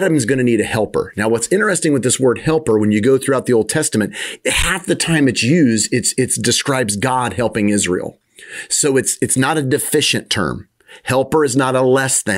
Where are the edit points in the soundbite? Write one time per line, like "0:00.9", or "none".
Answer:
none